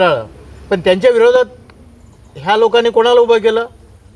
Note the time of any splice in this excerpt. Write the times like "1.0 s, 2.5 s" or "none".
none